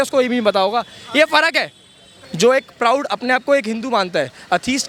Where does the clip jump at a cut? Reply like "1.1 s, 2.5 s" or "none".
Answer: none